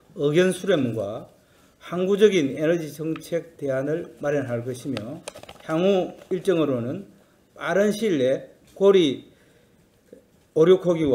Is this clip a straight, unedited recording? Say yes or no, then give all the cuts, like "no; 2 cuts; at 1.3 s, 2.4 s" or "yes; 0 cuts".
yes; 0 cuts